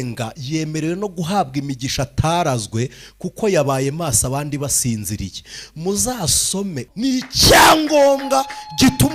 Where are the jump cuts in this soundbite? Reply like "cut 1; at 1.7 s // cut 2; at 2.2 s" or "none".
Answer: cut 1; at 6.9 s